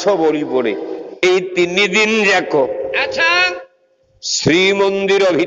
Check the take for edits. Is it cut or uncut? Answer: cut